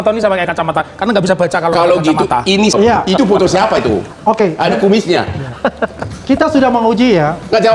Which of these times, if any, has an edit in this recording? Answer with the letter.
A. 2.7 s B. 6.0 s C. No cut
A